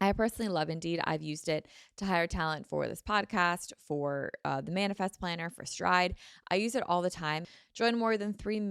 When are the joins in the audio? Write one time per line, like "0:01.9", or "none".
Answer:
0:07.5